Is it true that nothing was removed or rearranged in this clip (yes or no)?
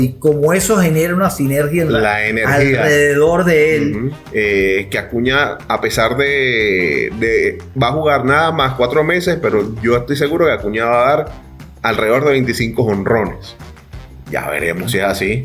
no